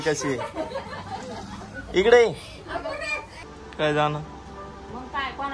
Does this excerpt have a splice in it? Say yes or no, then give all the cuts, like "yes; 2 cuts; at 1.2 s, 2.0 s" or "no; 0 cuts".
yes; 1 cut; at 3.4 s